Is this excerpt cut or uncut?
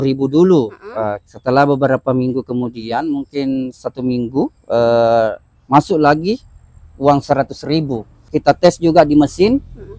cut